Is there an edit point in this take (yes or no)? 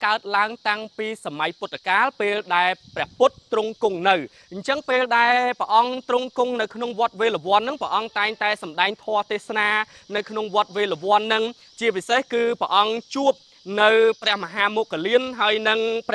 no